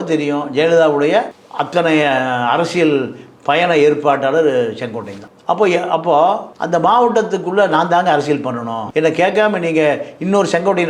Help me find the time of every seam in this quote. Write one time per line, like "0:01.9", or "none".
none